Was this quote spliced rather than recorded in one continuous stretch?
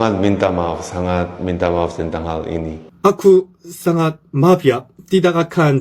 yes; 1 cut; at 2.8 s

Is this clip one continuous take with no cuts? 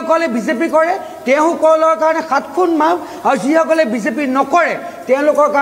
yes; 0 cuts

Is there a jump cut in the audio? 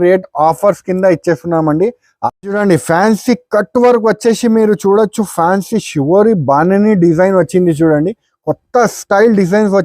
yes; 1 cut; at 2.1 s

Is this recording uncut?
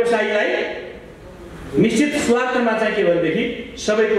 yes; 0 cuts

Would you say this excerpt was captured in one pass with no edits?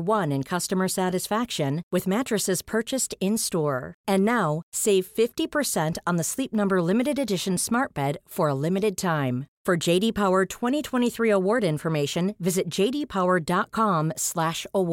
yes; 0 cuts

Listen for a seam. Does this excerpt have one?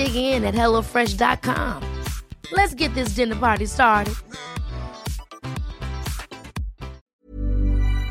yes; 1 cut; at 7.0 s

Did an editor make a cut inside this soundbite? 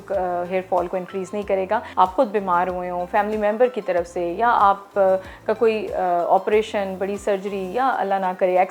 yes; 1 cut; at 1.9 s

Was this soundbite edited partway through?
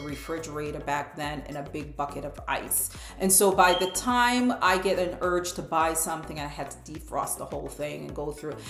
no; 0 cuts

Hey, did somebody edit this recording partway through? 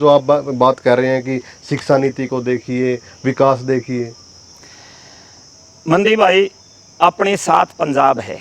no; 0 cuts

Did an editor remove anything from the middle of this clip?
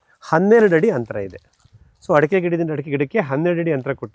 no; 0 cuts

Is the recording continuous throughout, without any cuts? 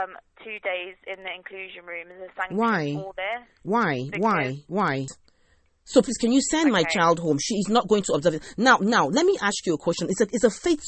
no; 1 cut; at 5.1 s

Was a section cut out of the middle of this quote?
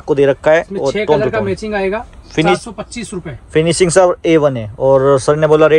no; 0 cuts

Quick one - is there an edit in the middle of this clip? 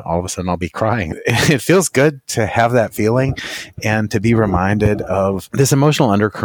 yes; 2 cuts; at 1.2 s, 5.4 s

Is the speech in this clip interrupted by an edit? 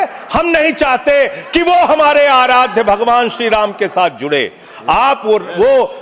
no; 0 cuts

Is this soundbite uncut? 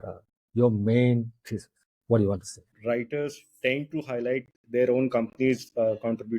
no; 1 cut; at 2.7 s

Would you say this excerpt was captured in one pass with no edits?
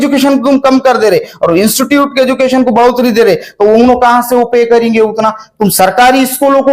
yes; 0 cuts

